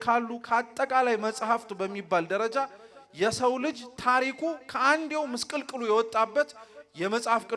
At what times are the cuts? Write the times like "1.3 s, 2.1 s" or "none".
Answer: none

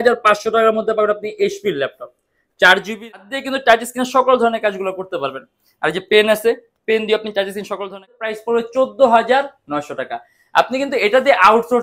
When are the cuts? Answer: 3.2 s, 8.2 s

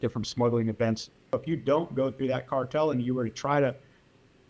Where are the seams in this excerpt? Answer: 1.3 s

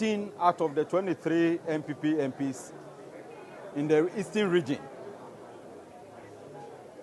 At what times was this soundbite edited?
none

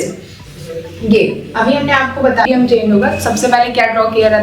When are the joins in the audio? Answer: 2.5 s

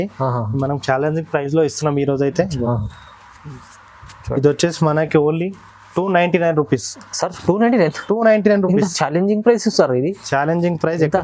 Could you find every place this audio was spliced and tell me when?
none

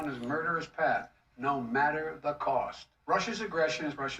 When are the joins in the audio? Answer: 1.2 s

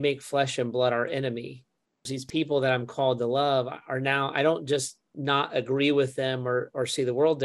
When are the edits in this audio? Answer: 2.2 s

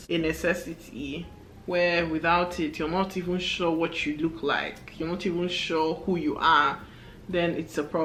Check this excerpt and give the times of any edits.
none

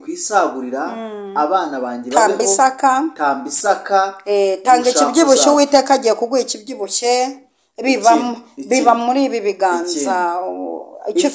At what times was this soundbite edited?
none

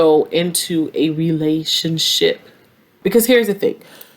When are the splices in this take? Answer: 2.9 s

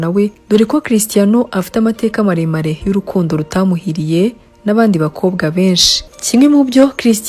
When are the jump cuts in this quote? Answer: 6.0 s

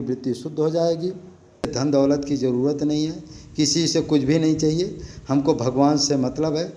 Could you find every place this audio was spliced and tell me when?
1.7 s

